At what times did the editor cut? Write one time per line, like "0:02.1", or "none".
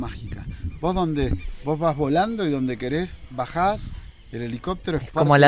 none